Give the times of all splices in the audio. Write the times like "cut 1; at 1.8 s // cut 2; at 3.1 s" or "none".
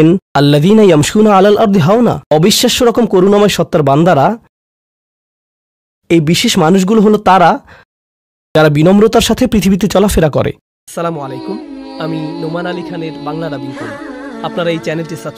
cut 1; at 10.8 s